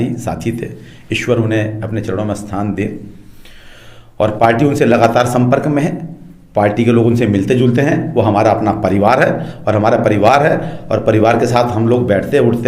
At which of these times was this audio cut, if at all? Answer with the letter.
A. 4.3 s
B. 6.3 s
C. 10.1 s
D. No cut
D